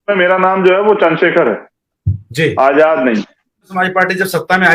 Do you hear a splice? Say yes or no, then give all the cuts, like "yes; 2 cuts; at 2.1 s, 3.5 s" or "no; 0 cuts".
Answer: yes; 1 cut; at 3.7 s